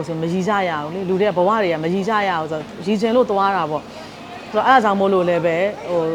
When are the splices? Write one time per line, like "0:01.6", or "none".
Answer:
none